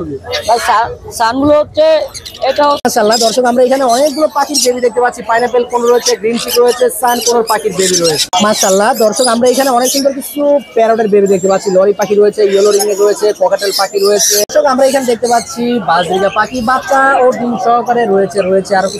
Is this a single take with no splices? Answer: no; 3 cuts; at 2.8 s, 8.2 s, 14.4 s

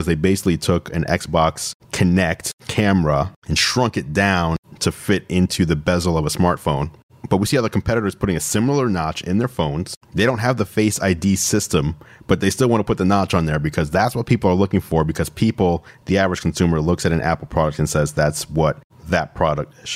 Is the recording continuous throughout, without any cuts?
yes; 0 cuts

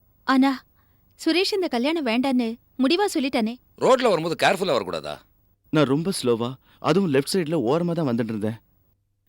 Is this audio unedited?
no; 1 cut; at 3.6 s

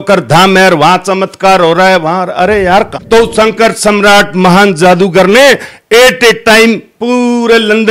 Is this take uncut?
no; 1 cut; at 2.9 s

